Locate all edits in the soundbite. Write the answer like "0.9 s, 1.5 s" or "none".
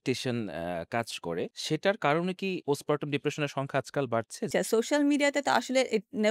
1.6 s, 2.6 s, 4.5 s